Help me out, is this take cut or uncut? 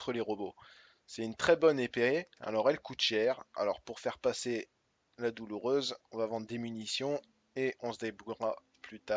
uncut